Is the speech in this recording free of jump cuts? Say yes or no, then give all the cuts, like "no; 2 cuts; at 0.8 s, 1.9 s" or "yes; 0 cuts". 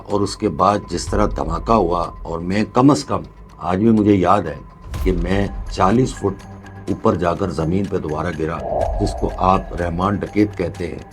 no; 1 cut; at 8.9 s